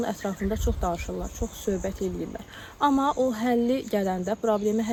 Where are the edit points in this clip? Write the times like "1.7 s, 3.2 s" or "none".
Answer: none